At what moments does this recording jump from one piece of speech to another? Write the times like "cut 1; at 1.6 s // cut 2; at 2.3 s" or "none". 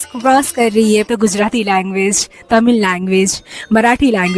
cut 1; at 1.1 s